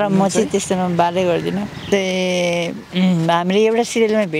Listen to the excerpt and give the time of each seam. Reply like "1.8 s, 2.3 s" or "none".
1.8 s